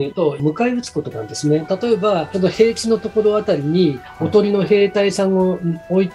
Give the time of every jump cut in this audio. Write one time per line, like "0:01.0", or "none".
0:01.6

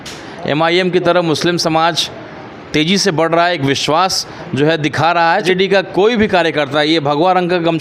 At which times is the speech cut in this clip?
0:05.4

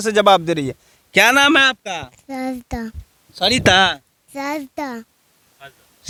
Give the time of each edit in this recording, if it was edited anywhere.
none

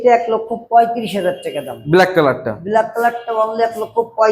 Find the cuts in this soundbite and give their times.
none

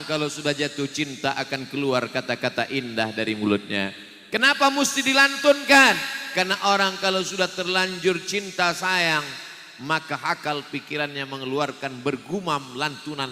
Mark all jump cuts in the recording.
none

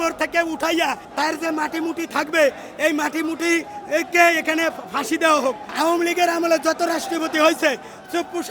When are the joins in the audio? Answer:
0:01.1
0:05.7

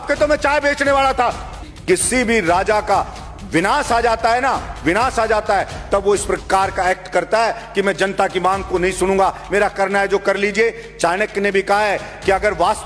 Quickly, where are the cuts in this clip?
0:01.7

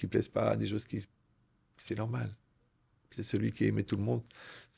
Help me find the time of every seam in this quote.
none

